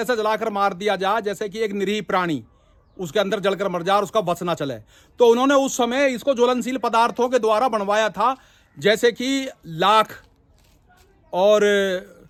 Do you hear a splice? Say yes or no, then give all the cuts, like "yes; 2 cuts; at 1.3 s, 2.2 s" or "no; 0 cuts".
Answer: no; 0 cuts